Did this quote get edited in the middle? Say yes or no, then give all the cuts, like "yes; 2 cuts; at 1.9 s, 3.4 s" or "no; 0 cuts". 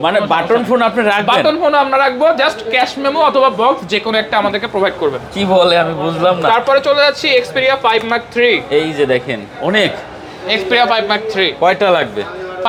no; 0 cuts